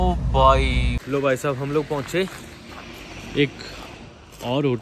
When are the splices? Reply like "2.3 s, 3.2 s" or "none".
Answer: 1.0 s